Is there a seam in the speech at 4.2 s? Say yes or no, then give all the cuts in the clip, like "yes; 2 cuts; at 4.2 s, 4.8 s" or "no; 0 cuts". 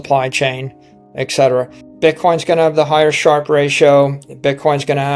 no; 1 cut; at 1.8 s